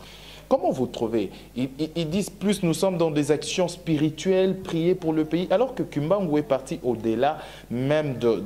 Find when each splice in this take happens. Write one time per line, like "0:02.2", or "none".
none